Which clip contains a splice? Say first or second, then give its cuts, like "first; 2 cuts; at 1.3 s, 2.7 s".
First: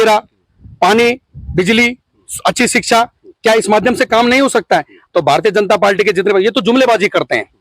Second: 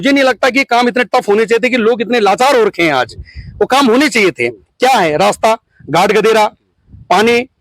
first; 1 cut; at 4.9 s